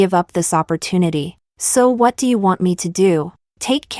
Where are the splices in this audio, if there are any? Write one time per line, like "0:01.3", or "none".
0:01.4